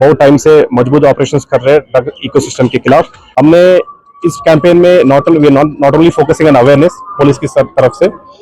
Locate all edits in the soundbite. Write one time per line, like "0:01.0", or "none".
0:03.2